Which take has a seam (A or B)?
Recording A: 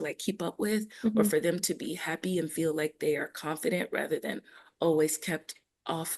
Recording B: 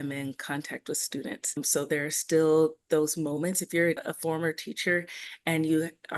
B